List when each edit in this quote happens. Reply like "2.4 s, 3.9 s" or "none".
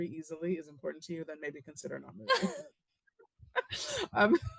none